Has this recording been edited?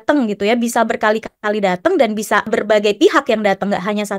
yes; 1 cut; at 2.5 s

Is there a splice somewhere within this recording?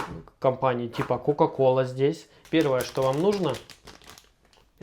yes; 1 cut; at 2.3 s

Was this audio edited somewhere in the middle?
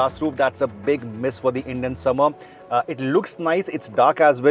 no; 0 cuts

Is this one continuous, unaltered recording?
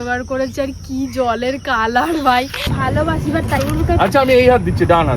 no; 1 cut; at 2.7 s

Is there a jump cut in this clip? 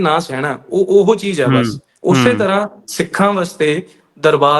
yes; 1 cut; at 1.9 s

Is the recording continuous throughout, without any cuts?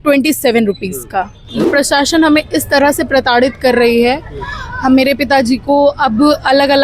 no; 1 cut; at 1.6 s

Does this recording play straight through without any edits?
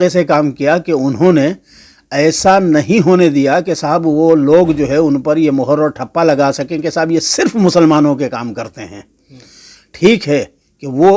yes; 0 cuts

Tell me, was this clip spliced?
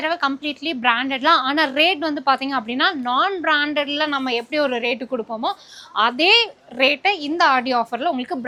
no; 0 cuts

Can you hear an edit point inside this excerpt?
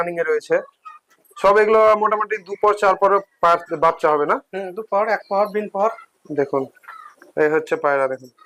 no; 0 cuts

